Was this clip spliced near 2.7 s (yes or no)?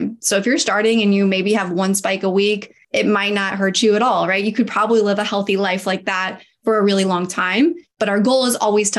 yes